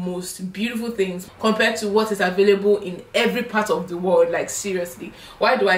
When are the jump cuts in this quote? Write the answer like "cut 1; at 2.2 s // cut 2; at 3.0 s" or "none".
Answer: cut 1; at 1.2 s